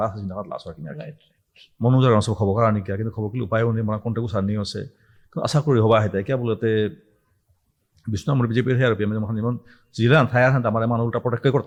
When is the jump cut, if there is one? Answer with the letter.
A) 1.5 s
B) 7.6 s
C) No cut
C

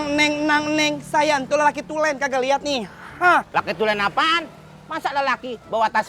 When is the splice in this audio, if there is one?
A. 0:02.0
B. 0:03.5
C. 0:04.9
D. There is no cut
B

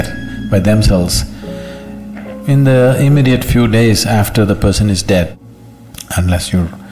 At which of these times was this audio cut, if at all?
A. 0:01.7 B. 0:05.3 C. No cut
B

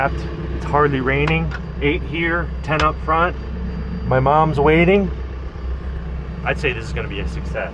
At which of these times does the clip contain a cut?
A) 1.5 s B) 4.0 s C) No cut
C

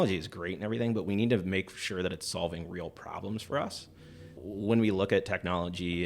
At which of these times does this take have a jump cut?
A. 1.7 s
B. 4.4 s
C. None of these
B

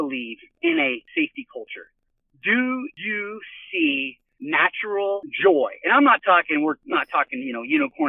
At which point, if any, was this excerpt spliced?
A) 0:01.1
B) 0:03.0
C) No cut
B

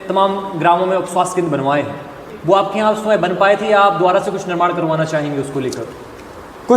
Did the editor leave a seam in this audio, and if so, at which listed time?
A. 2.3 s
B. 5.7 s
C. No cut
A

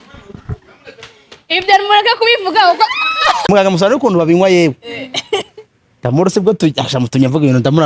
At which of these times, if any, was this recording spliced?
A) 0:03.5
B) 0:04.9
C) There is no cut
A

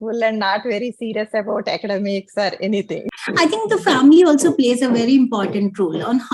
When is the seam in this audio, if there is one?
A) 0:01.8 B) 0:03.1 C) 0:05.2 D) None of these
B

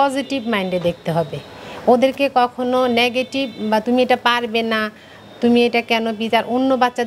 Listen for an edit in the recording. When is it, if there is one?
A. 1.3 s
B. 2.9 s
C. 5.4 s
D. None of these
D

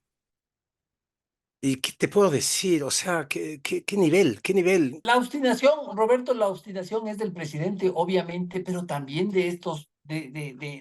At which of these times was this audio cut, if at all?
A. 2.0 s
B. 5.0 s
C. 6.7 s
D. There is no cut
B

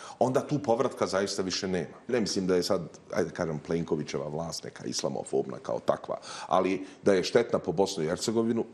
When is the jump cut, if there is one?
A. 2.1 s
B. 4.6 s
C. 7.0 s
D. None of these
A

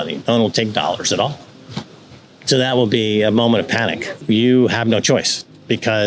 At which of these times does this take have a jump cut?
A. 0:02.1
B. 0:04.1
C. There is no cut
B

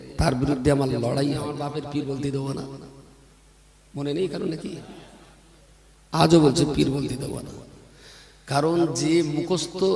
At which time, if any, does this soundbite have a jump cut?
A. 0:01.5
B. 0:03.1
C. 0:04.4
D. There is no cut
A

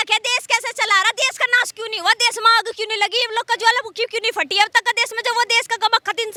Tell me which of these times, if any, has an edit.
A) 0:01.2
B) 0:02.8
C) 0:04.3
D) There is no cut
D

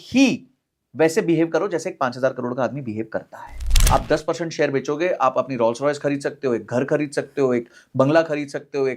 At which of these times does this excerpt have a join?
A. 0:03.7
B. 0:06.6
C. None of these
A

